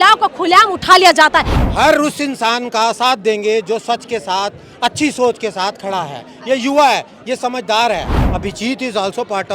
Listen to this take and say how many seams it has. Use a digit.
2